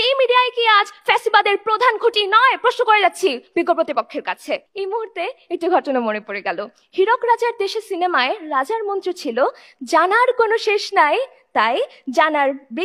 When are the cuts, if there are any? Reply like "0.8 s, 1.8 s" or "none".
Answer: none